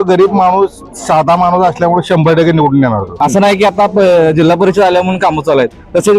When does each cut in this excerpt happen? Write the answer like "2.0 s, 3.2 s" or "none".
3.0 s